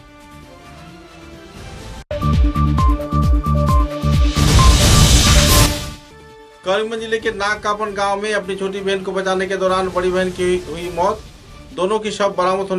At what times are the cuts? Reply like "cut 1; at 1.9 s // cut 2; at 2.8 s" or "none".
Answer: none